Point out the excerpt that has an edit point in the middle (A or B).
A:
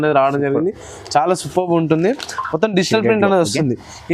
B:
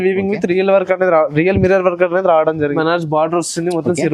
B